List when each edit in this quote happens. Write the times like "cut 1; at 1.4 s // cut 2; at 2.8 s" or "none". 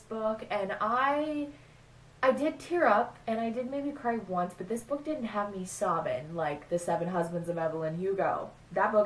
none